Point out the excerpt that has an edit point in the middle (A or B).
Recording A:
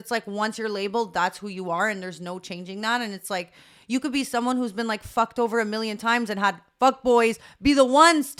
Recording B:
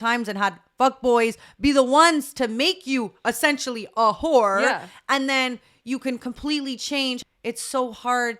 B